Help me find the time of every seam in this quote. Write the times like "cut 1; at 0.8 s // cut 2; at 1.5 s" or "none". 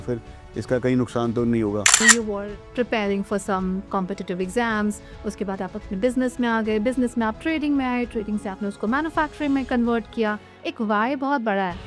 cut 1; at 2.2 s